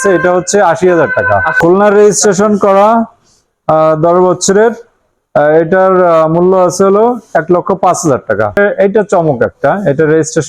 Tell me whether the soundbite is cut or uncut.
cut